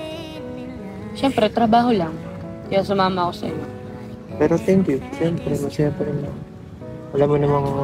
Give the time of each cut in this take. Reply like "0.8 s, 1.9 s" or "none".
none